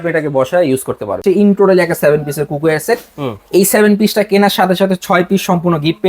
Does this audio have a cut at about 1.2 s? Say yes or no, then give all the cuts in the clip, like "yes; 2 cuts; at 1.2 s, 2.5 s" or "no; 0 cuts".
yes; 1 cut; at 1.2 s